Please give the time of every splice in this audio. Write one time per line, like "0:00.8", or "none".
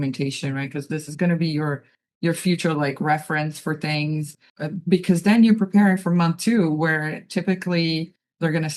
0:04.4